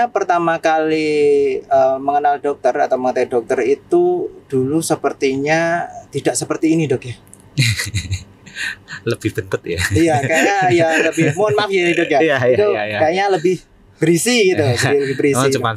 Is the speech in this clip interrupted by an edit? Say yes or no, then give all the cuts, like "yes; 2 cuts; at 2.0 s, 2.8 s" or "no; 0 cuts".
no; 0 cuts